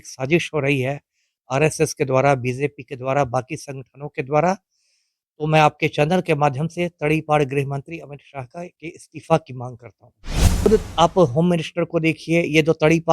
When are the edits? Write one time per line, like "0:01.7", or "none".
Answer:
0:10.5